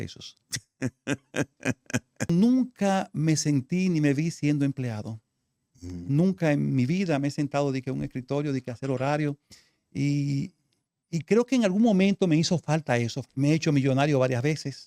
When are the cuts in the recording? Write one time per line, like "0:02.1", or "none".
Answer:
0:02.3
0:13.2